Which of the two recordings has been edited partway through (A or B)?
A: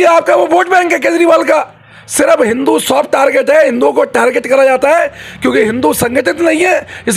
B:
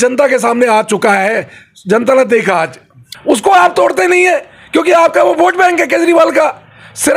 B